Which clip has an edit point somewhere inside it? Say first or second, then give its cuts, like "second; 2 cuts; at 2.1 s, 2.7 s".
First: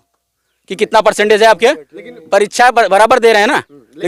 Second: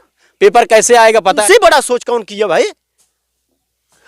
second; 1 cut; at 1.4 s